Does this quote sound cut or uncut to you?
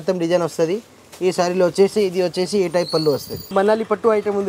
cut